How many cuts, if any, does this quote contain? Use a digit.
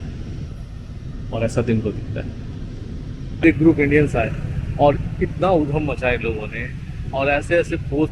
1